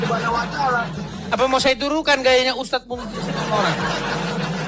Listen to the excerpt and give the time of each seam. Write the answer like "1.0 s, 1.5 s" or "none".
1.3 s